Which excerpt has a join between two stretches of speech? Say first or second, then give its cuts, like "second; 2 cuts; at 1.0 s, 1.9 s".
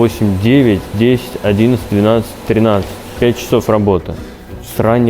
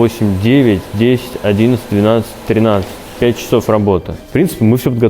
second; 1 cut; at 4.2 s